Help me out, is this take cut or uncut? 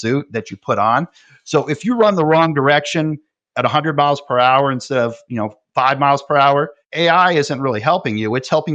uncut